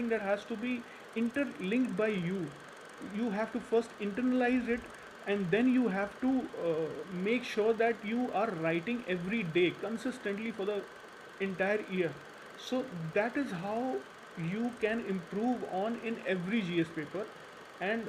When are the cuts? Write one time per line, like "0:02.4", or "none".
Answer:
none